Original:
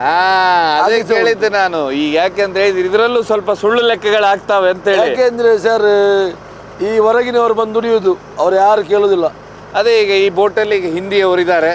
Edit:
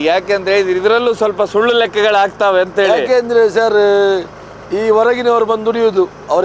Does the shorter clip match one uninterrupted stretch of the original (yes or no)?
yes